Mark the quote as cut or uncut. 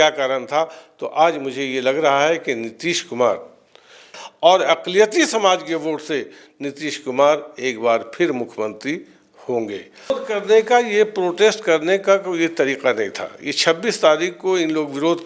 cut